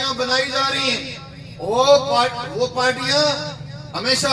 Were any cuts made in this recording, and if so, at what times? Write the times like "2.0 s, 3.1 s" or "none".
none

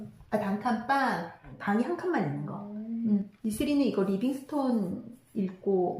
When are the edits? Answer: 1.4 s, 3.3 s

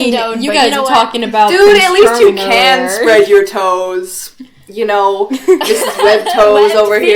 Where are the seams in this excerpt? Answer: none

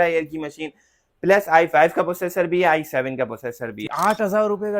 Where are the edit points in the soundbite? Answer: 3.9 s

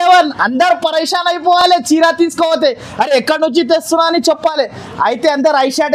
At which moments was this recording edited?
none

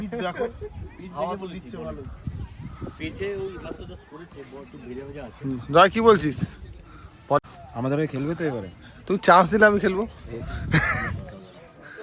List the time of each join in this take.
7.4 s

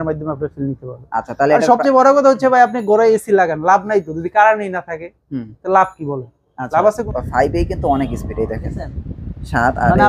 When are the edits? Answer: 7.0 s

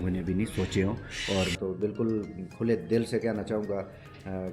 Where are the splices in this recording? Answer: 1.5 s

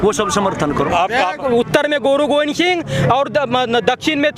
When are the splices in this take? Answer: 1.4 s

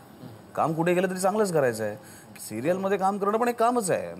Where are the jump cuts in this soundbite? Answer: 2.2 s

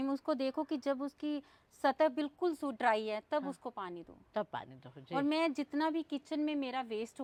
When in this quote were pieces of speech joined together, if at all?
none

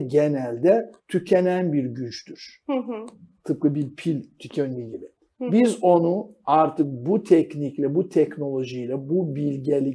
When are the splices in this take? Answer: 1.0 s

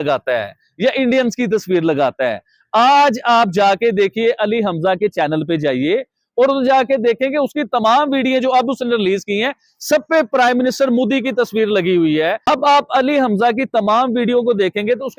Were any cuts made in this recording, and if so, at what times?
12.4 s

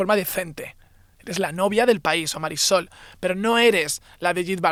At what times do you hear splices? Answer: none

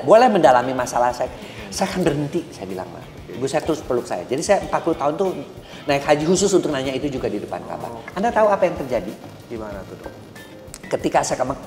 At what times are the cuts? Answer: none

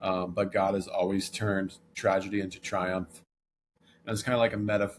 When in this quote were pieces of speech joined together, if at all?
1.9 s, 3.7 s

